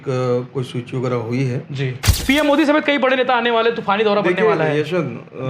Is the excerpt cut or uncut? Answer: cut